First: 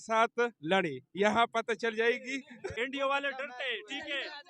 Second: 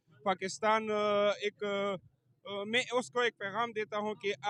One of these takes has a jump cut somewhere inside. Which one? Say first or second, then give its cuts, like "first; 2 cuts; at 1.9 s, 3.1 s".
first; 1 cut; at 2.7 s